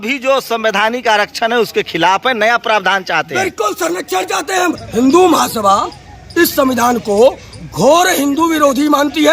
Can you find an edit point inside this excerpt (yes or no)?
yes